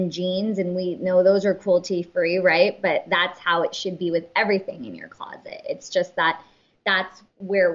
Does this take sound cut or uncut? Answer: cut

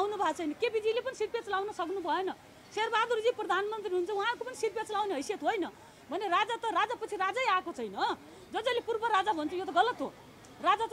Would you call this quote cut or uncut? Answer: uncut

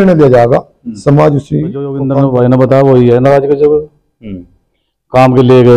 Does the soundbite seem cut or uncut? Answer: cut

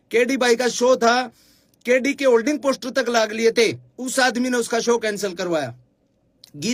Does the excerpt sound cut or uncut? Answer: uncut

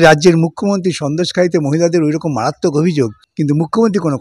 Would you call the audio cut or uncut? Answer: cut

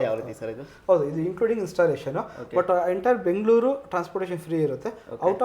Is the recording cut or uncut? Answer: uncut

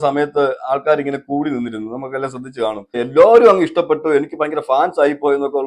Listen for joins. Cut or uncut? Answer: cut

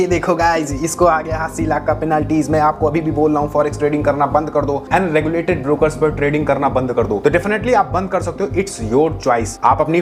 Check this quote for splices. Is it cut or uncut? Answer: uncut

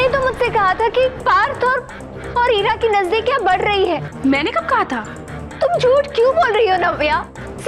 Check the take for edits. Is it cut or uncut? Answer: cut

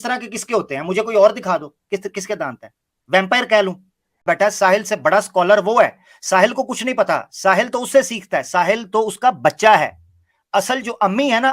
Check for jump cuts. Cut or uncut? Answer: cut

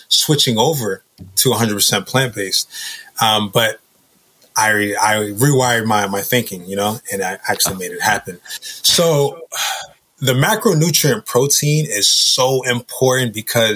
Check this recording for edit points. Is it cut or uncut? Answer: uncut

